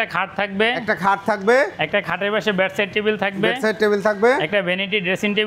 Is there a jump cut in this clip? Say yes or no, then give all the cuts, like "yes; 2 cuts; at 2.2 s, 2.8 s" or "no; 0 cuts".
no; 0 cuts